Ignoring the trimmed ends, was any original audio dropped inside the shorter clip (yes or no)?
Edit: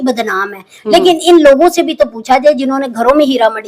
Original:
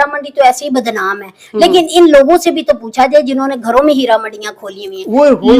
no